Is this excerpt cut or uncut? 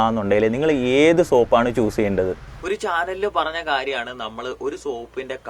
cut